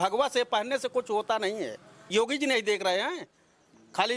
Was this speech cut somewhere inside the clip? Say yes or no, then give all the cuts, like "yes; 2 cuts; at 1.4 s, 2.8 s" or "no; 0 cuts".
yes; 1 cut; at 2.0 s